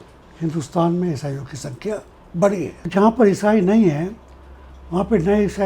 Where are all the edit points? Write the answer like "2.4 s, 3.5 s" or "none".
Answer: 2.8 s